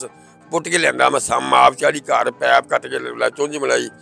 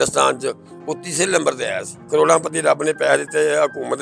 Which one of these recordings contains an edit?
second; 1 cut; at 1.9 s

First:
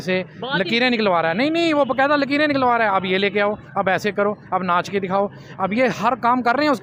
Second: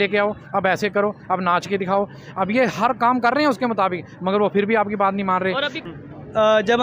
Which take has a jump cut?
second; 1 cut; at 5.8 s

